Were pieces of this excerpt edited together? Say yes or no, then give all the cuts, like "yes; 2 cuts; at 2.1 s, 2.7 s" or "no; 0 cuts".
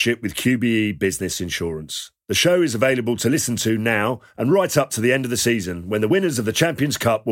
no; 0 cuts